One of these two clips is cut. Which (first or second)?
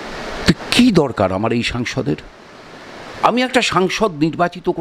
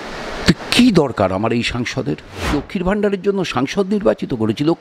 second